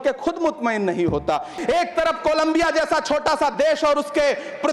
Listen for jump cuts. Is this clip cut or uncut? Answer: cut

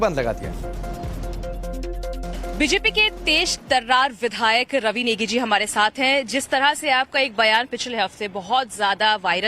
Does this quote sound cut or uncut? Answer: uncut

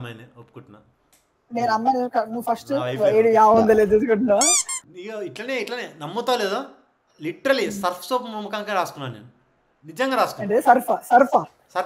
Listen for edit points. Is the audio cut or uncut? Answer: cut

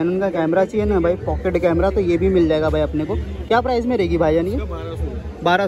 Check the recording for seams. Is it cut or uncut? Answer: uncut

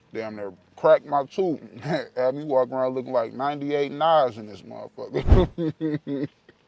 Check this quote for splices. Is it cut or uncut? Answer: uncut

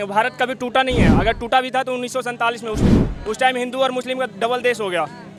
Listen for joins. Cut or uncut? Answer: uncut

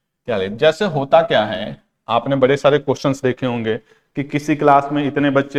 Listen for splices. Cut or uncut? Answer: uncut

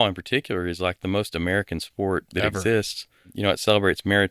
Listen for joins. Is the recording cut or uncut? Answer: cut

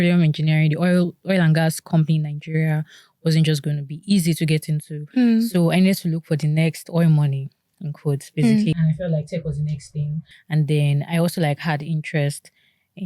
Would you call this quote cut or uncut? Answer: uncut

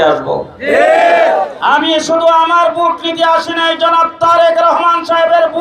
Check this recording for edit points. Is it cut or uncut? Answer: cut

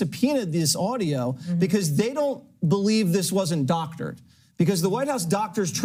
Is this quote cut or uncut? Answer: uncut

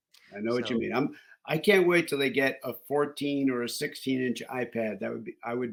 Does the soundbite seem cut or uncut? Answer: uncut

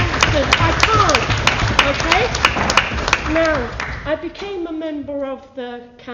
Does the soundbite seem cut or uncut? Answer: uncut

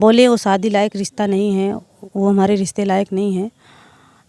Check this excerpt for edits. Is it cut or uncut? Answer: uncut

